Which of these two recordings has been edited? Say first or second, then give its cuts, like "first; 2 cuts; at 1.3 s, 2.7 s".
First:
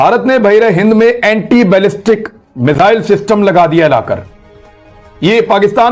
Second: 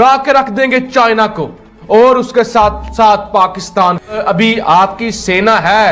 second; 1 cut; at 4.2 s